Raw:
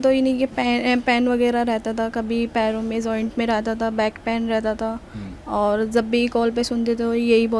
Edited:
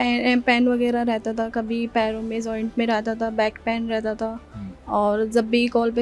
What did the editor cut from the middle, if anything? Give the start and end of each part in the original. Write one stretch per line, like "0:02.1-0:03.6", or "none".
none